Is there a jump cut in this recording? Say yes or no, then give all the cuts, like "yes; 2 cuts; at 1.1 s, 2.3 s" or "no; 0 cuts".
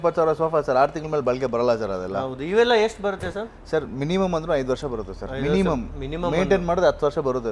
no; 0 cuts